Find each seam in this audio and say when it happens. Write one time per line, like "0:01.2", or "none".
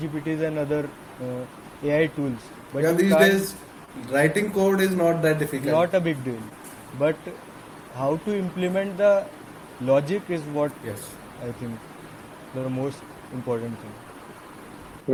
none